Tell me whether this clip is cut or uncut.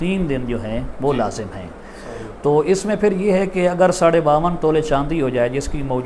uncut